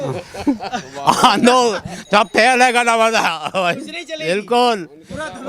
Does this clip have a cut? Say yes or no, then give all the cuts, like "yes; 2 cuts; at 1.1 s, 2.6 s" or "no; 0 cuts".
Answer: no; 0 cuts